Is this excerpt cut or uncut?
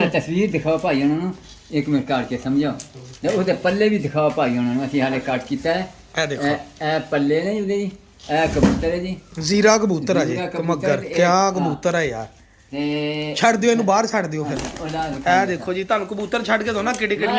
uncut